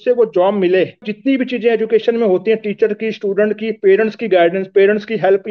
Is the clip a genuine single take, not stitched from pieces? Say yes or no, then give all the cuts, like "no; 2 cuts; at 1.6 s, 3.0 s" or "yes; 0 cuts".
no; 1 cut; at 1.1 s